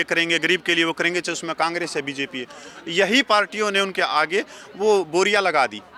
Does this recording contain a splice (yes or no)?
no